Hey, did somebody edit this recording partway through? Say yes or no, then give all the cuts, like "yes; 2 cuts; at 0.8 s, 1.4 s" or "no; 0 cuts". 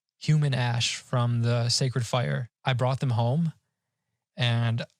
yes; 1 cut; at 2.5 s